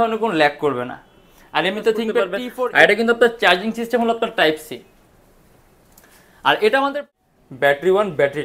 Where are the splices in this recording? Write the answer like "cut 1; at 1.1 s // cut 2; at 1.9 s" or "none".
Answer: cut 1; at 2.4 s // cut 2; at 7.0 s